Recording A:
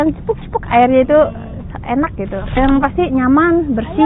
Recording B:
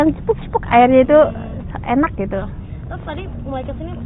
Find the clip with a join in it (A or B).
A